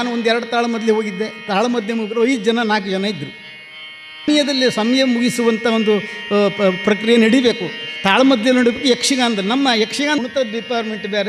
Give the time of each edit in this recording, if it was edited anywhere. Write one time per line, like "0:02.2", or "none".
0:04.3
0:10.2